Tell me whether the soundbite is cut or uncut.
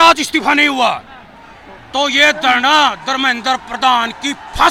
uncut